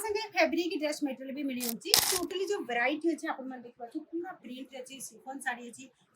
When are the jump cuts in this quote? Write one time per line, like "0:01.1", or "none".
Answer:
0:02.1